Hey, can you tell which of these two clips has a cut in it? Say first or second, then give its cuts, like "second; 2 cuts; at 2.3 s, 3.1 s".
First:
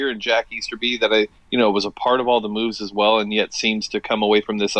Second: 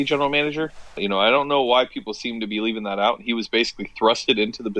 second; 1 cut; at 1.0 s